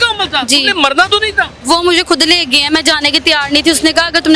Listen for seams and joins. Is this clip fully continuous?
no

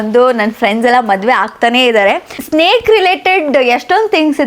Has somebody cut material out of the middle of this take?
yes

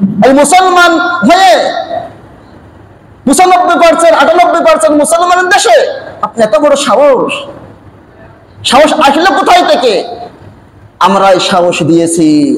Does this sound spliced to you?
no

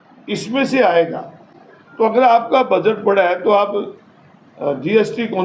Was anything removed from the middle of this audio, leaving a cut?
no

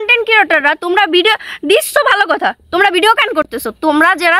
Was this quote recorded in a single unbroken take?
yes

